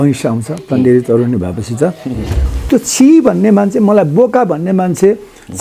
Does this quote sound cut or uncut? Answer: cut